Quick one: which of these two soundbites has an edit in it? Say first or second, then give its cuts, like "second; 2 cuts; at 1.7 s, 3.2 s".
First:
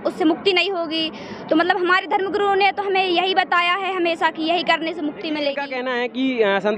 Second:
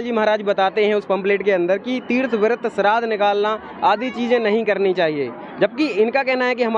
first; 1 cut; at 5.7 s